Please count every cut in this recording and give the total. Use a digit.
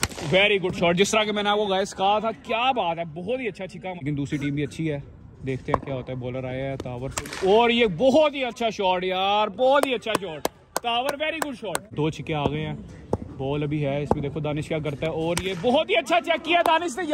2